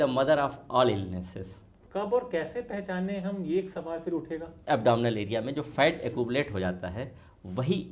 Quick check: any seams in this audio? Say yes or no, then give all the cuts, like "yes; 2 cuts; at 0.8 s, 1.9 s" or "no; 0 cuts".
yes; 2 cuts; at 1.8 s, 4.5 s